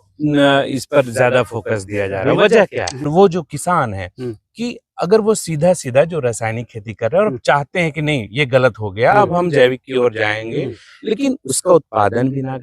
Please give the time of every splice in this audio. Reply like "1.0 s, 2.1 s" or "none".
3.1 s